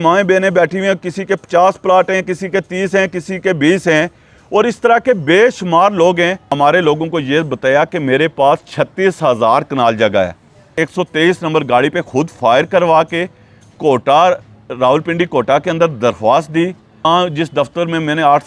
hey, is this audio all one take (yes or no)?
no